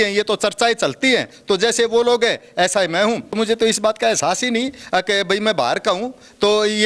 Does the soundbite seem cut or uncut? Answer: cut